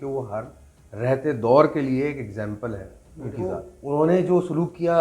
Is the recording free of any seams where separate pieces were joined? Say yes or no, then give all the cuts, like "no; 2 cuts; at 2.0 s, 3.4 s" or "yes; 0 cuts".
no; 1 cut; at 3.7 s